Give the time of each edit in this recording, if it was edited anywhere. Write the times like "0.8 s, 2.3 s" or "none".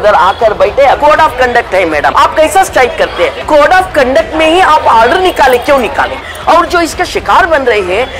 1.0 s, 2.1 s, 3.4 s, 6.3 s